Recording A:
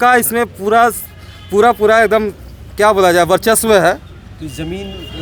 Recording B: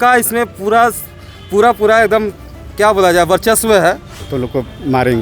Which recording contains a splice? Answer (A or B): B